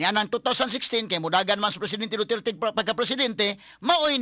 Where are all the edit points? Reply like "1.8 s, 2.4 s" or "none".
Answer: none

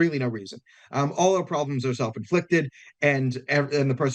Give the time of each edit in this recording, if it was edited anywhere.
none

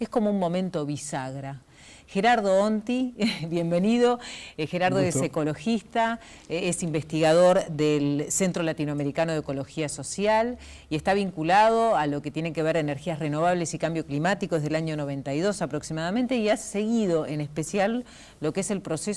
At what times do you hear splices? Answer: 18.3 s

